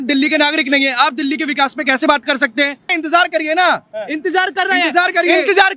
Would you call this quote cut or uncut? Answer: cut